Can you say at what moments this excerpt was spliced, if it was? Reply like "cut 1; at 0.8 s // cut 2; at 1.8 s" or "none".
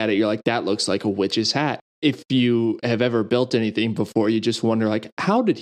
cut 1; at 1.9 s